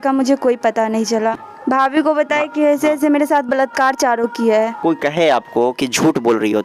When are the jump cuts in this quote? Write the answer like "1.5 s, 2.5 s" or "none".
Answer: 1.4 s, 4.8 s